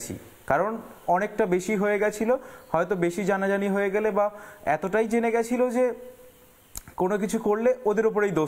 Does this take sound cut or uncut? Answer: uncut